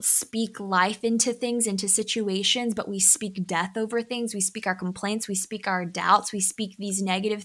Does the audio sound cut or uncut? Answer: uncut